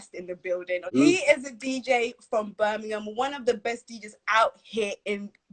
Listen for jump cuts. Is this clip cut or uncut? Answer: cut